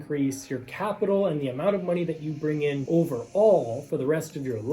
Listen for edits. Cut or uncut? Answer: cut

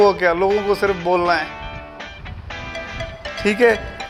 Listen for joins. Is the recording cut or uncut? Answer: uncut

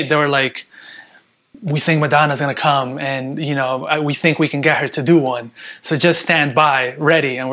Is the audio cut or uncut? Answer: uncut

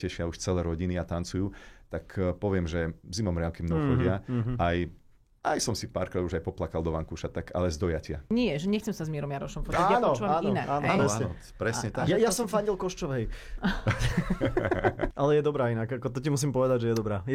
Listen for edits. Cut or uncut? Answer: cut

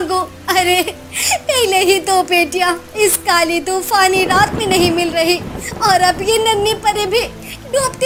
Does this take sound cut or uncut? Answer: uncut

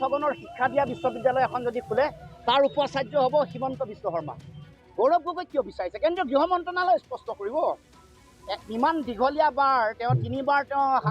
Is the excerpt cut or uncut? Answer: cut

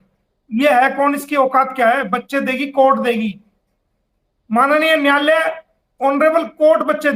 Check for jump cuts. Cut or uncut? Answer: uncut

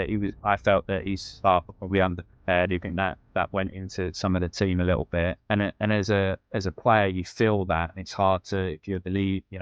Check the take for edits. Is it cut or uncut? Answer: cut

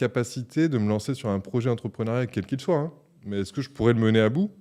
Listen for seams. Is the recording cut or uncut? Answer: uncut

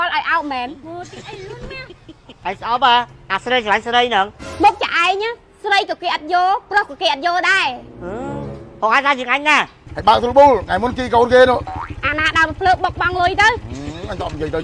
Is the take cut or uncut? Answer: cut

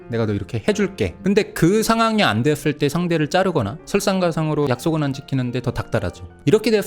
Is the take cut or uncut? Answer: cut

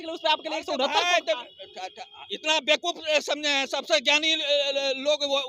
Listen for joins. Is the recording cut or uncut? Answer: uncut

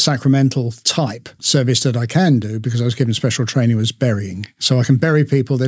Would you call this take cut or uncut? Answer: cut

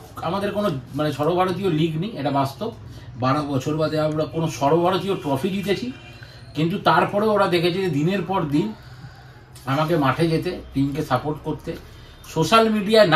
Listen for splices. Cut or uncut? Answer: uncut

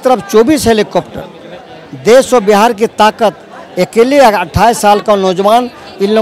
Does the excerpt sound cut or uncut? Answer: uncut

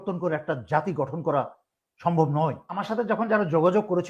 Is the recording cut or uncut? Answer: cut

